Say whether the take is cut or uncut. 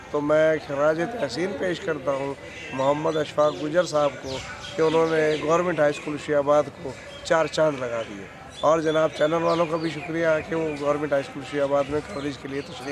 uncut